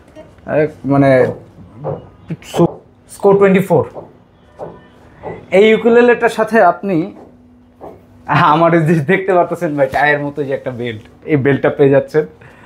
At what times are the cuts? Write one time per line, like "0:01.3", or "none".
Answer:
0:02.7